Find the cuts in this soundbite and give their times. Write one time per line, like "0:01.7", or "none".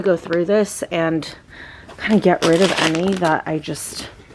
none